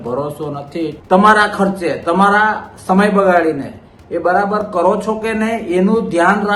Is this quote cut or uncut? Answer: cut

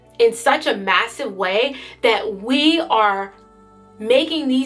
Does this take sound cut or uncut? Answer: uncut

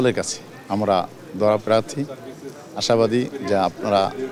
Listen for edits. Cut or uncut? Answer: uncut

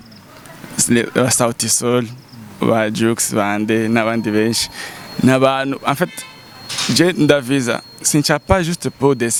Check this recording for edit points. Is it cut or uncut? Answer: uncut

